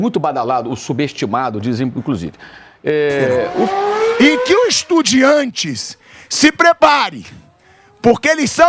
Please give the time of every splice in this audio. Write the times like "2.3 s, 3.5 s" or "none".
3.7 s